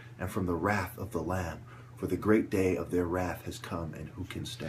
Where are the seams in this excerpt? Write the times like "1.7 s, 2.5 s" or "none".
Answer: 1.3 s

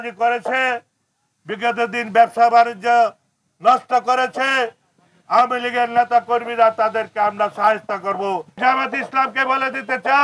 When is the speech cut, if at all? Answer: 8.6 s

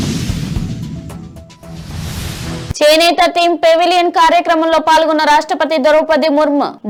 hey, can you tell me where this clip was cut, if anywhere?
none

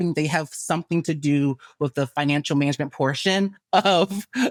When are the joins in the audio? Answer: none

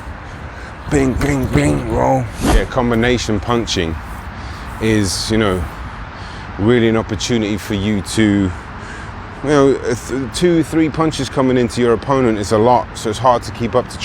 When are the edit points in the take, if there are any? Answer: 2.7 s

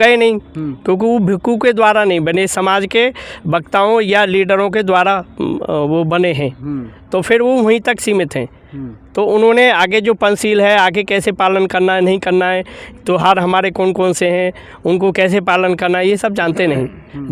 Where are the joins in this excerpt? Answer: none

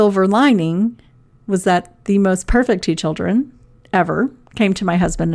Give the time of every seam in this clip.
none

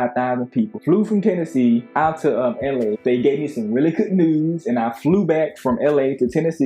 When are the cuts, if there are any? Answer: 3.0 s

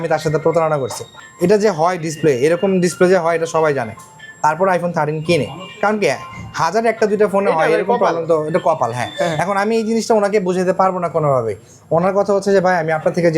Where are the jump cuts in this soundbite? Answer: none

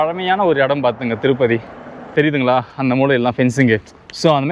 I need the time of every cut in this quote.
2.0 s

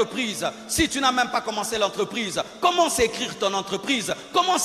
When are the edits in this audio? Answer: none

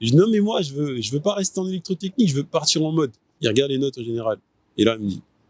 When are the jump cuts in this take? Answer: 3.4 s

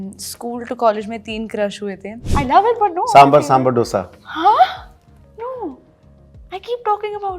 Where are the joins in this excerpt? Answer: 2.2 s

